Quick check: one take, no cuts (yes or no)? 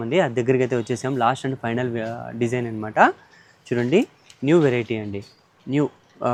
yes